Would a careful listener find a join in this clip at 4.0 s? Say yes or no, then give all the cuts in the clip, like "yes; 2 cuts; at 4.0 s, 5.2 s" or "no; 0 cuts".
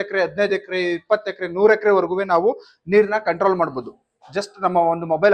no; 0 cuts